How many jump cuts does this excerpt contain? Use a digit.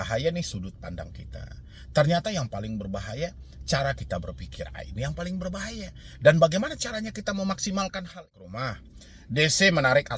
1